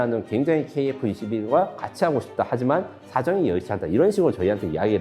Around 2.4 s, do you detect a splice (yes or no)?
no